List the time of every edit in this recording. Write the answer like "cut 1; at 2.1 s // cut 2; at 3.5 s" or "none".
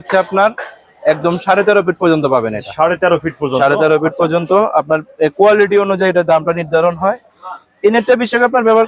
none